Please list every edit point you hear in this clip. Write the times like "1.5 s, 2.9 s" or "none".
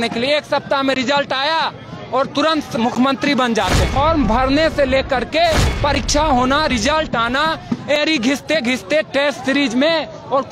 3.9 s